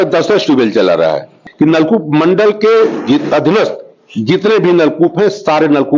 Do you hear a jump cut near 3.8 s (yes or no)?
no